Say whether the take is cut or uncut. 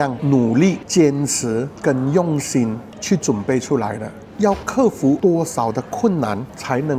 uncut